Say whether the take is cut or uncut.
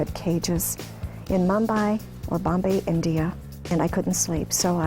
cut